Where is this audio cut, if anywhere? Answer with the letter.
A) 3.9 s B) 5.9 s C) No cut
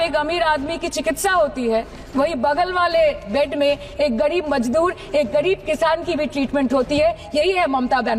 C